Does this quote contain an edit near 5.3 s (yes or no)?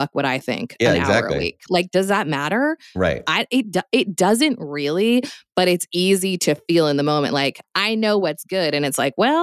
no